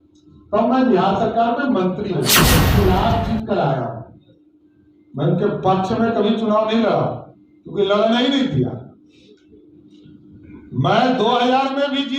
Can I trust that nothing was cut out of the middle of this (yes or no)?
no